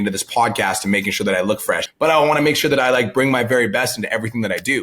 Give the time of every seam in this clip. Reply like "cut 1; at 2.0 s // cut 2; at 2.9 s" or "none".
cut 1; at 1.9 s